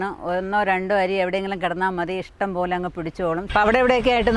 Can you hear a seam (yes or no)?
yes